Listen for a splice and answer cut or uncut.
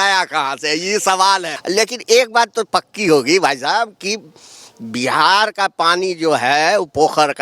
cut